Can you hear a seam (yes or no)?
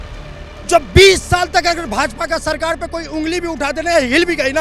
no